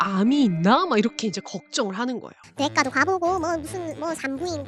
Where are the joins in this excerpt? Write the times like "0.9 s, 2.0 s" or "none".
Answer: 2.4 s